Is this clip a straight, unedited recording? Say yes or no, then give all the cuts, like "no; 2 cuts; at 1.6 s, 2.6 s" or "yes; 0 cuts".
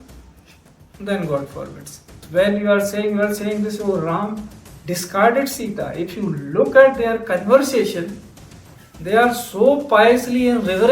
no; 1 cut; at 2.2 s